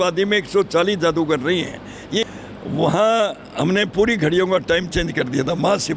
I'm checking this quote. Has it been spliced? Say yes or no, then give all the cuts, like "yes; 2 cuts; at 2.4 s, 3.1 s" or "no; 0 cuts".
yes; 1 cut; at 2.3 s